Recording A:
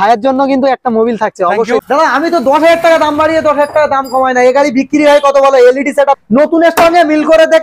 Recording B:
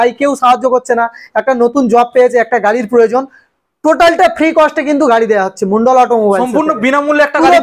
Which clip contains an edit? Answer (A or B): A